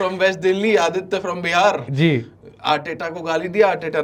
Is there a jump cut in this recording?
no; 0 cuts

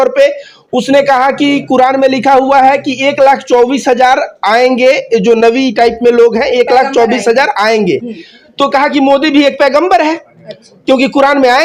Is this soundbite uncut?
yes; 0 cuts

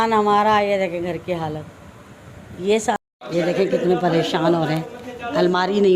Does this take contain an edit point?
yes; 1 cut; at 3.0 s

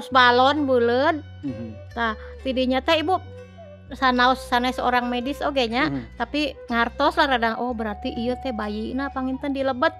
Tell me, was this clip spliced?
no; 0 cuts

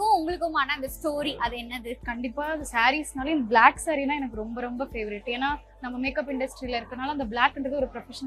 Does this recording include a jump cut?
no; 0 cuts

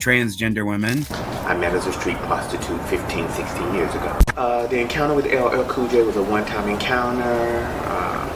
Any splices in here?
yes; 1 cut; at 1.1 s

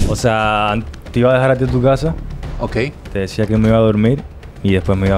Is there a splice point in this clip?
no; 0 cuts

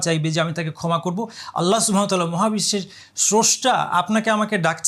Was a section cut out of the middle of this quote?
no; 0 cuts

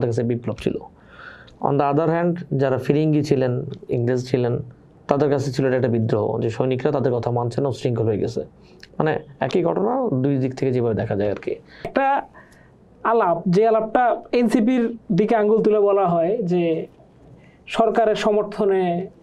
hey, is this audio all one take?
no; 1 cut; at 11.9 s

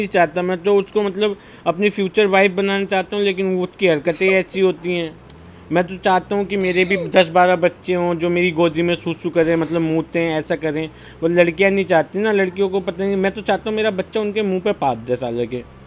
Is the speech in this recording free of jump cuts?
yes; 0 cuts

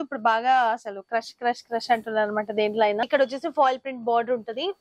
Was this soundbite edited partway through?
yes; 1 cut; at 3.0 s

